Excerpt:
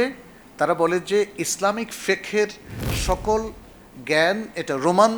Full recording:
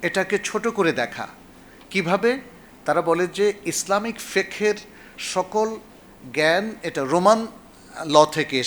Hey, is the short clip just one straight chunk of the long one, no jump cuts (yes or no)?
yes